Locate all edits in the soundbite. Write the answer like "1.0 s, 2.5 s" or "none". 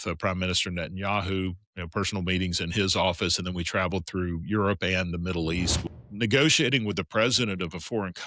5.8 s